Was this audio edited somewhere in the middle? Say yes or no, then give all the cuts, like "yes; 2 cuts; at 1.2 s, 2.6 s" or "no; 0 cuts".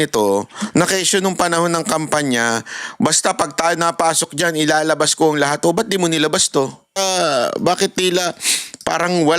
yes; 1 cut; at 6.9 s